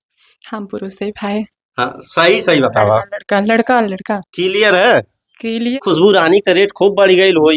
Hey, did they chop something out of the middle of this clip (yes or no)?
yes